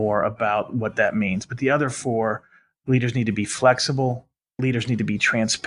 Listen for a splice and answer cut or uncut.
cut